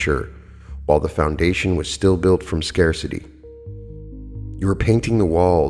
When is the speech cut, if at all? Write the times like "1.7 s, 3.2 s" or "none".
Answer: none